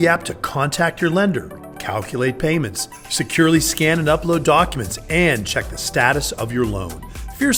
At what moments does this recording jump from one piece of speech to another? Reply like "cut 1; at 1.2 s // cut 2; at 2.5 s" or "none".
none

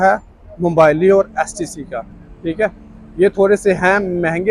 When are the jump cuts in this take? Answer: none

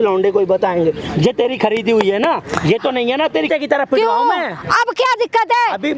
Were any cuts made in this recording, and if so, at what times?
cut 1; at 3.5 s

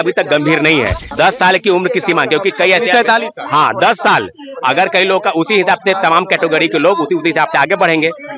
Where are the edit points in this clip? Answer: cut 1; at 1.0 s

